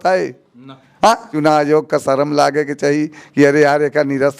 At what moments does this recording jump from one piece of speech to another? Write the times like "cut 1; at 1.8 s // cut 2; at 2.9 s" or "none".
cut 1; at 1.3 s